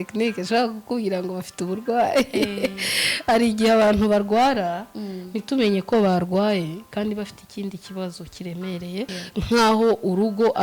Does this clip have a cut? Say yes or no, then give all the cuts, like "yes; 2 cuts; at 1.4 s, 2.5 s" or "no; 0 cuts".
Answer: yes; 1 cut; at 9.1 s